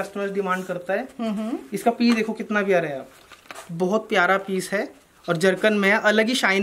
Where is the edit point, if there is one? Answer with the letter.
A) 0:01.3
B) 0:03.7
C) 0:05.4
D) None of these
D